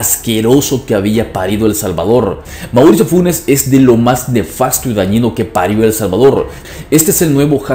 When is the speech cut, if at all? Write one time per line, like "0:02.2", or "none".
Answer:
0:02.4
0:06.7